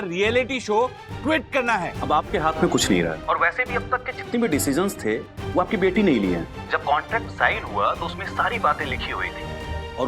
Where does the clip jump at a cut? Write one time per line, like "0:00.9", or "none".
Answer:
0:02.0
0:03.2
0:06.5

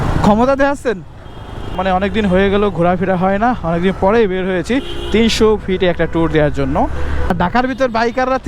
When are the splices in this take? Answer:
0:01.7
0:07.3

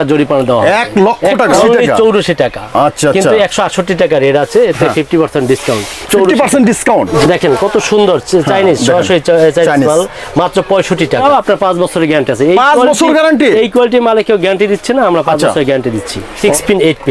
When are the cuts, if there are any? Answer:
0:01.6
0:07.1
0:11.2
0:16.4

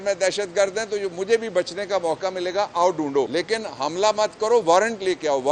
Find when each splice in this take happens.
0:03.3

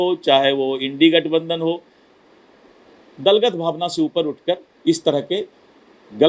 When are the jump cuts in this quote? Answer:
none

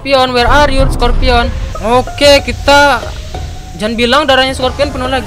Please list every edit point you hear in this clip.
0:01.6

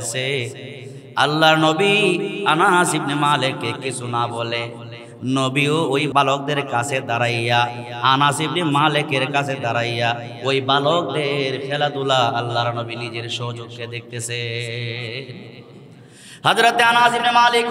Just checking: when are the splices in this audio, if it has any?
0:06.1

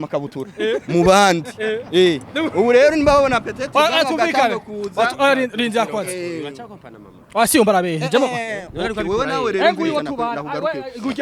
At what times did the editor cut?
none

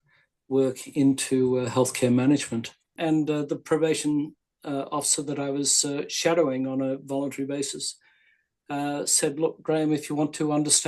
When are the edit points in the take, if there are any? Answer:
0:02.9

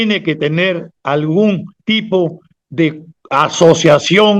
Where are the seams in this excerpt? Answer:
0:00.9
0:01.7
0:03.1

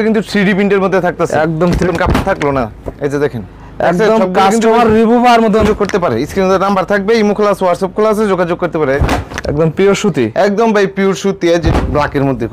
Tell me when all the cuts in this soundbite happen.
0:01.9
0:05.6
0:09.0
0:11.6

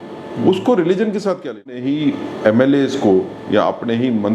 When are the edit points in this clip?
0:01.8

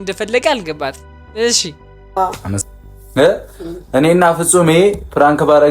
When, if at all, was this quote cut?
0:02.6

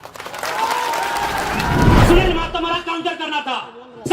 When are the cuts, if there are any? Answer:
0:02.0

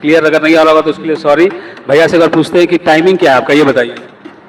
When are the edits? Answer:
none

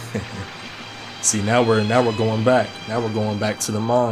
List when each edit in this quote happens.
none

